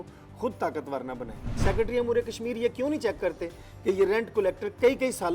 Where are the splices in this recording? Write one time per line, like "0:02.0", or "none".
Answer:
0:01.5